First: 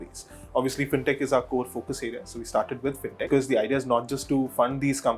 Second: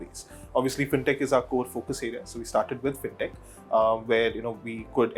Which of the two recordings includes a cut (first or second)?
first